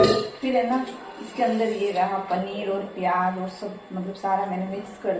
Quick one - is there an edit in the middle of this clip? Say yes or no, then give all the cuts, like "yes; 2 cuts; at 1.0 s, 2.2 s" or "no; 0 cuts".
no; 0 cuts